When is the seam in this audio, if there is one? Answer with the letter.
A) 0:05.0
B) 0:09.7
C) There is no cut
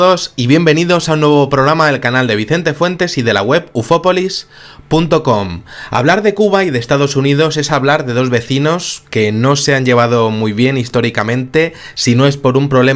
B